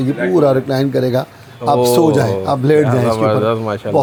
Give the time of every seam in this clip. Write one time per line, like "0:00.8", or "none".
none